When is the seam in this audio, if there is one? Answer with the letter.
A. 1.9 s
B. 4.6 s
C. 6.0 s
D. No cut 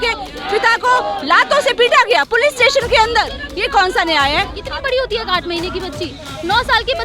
B